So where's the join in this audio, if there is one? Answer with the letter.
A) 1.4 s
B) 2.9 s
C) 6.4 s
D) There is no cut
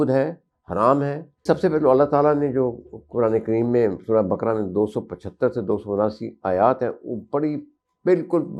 A